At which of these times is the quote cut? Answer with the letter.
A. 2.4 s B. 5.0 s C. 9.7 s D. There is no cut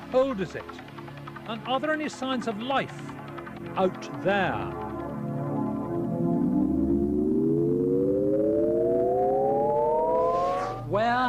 A